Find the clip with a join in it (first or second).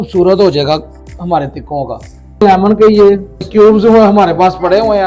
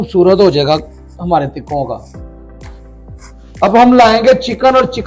first